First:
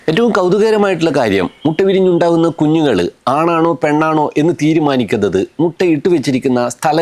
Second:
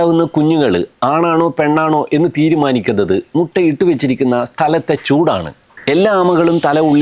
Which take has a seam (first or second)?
second